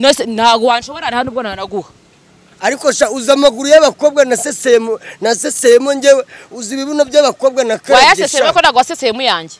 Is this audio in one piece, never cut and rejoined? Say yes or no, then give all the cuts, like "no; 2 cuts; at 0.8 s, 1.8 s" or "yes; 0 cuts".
yes; 0 cuts